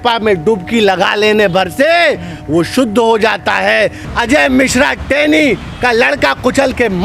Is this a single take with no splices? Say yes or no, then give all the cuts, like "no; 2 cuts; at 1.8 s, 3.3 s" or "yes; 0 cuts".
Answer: no; 1 cut; at 4.0 s